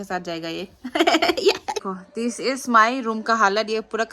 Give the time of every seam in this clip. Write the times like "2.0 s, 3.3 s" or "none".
2.2 s